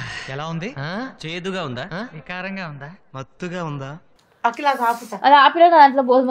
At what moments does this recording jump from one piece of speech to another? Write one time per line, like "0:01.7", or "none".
0:04.1